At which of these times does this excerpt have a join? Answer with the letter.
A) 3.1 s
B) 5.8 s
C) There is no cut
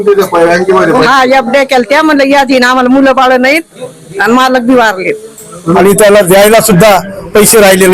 B